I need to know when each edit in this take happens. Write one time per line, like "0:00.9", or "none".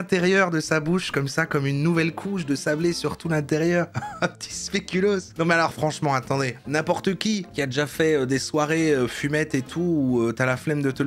none